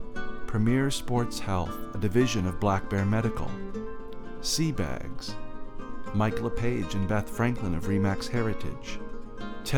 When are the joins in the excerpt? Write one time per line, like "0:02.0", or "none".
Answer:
none